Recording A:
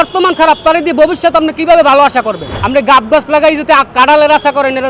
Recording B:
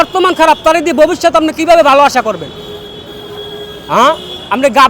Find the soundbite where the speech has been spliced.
A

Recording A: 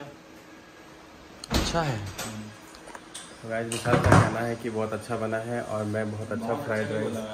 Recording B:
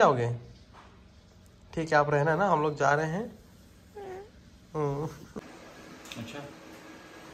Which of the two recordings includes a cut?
B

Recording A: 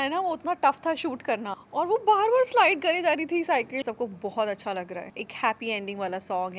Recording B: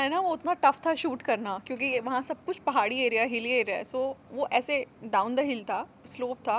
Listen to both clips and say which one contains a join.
A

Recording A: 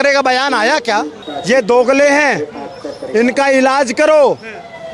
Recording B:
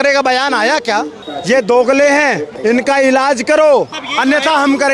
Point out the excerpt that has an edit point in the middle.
B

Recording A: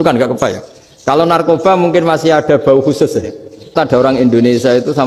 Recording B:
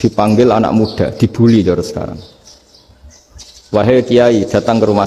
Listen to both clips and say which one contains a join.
A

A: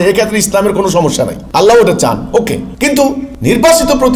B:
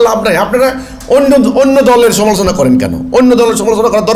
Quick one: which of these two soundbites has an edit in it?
A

